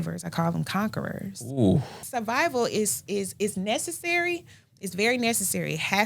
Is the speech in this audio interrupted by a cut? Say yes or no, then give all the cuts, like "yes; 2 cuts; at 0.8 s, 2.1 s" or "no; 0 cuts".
yes; 1 cut; at 2.0 s